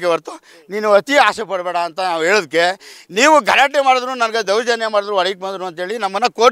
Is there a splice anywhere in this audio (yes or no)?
no